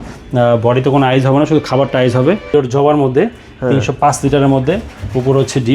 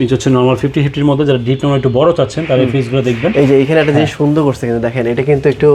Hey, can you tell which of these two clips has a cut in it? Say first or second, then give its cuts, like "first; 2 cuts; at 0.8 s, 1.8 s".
first; 1 cut; at 2.5 s